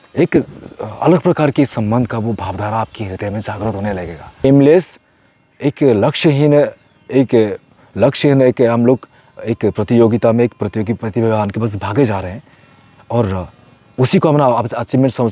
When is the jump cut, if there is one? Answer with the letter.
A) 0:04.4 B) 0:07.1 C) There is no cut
A